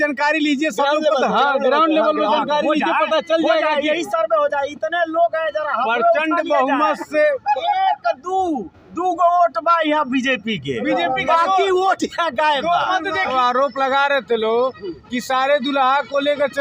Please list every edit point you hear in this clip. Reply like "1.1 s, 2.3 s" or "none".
13.3 s